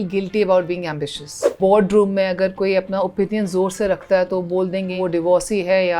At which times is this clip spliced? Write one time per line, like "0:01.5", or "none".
0:01.6
0:05.0

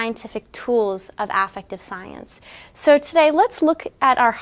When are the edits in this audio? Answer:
none

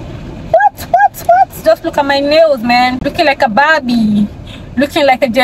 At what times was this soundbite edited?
0:03.0

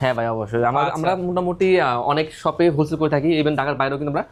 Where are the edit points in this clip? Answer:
none

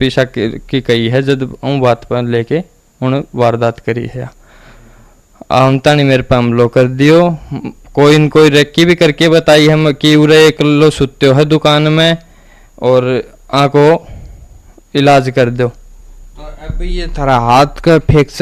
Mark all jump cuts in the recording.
none

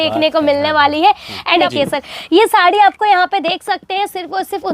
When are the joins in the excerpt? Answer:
0:01.7

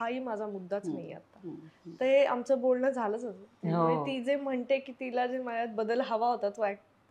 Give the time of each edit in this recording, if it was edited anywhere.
none

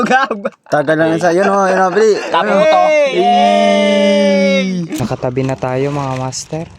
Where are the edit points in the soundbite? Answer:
0:05.0

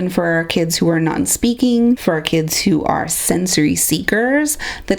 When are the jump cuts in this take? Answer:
0:02.0

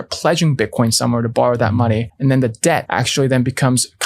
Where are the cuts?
0:02.1
0:02.9

